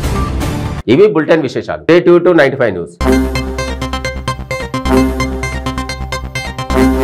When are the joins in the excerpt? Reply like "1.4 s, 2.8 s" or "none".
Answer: none